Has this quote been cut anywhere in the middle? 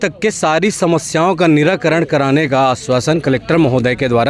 no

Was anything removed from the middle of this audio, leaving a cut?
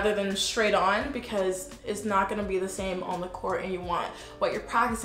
no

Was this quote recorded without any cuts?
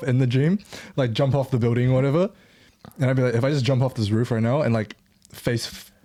yes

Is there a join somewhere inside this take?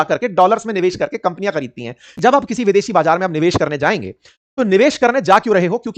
yes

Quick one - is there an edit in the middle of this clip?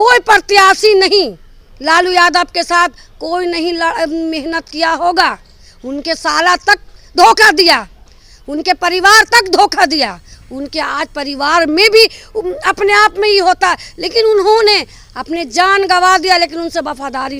no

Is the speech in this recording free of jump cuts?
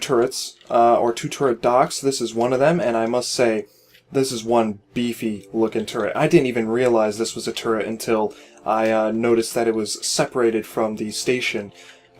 no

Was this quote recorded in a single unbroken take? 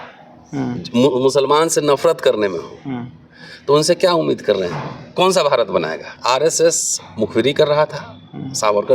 no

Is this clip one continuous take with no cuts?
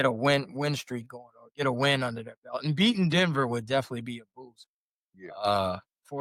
yes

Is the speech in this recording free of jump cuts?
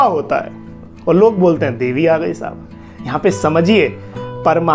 yes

